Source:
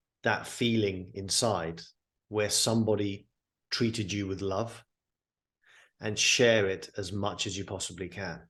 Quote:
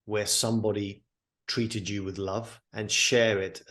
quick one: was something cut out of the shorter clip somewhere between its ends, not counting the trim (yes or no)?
yes